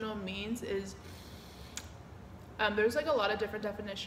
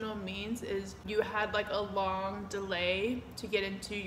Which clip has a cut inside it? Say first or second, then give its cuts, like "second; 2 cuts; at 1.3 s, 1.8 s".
second; 1 cut; at 1.0 s